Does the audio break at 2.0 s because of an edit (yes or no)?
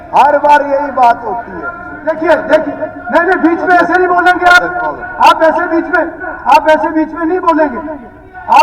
yes